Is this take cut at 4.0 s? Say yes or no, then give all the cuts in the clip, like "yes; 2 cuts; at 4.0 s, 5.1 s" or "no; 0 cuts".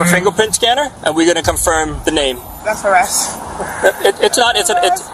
no; 2 cuts; at 0.9 s, 2.2 s